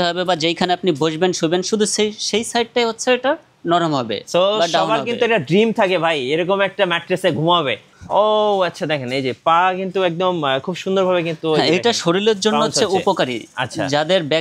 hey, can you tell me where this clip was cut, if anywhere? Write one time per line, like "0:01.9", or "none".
0:07.9

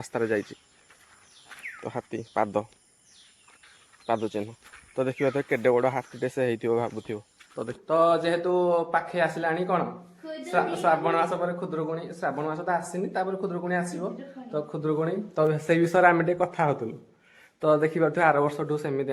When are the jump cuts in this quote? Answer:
0:07.7

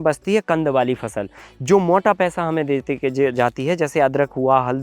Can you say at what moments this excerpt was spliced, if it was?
none

